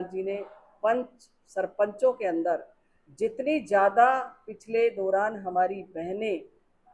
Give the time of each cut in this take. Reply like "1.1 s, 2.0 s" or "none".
none